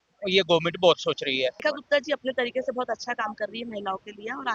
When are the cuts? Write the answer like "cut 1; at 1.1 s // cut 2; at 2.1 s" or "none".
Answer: cut 1; at 1.7 s